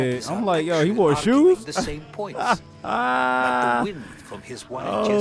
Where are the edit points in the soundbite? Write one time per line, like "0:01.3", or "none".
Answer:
none